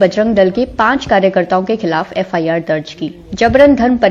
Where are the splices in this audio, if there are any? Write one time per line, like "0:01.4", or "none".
0:03.2